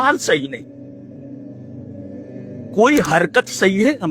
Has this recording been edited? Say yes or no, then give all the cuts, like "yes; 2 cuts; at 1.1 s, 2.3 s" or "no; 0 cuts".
yes; 2 cuts; at 1.2 s, 2.8 s